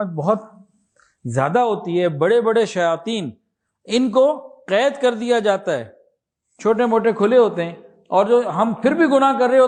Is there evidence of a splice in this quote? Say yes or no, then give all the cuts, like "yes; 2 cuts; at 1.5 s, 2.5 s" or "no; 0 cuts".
no; 0 cuts